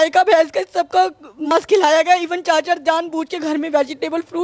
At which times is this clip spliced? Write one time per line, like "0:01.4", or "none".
0:01.5